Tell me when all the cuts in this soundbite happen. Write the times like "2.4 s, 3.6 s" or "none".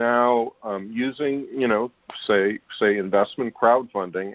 none